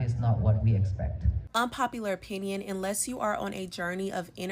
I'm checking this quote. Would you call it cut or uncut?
cut